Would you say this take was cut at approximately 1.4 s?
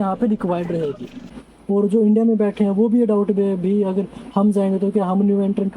yes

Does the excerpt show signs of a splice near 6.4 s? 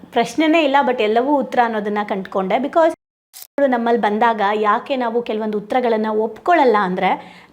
no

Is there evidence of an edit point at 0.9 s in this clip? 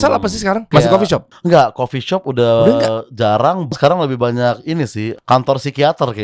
yes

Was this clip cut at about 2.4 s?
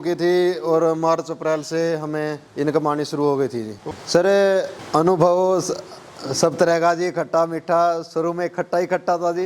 no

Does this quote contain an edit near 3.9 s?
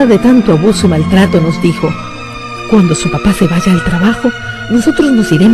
no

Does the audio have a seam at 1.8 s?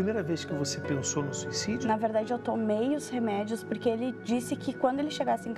yes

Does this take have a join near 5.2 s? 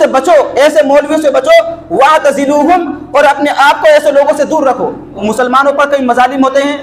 yes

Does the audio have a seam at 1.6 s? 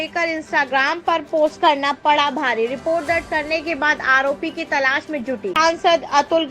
no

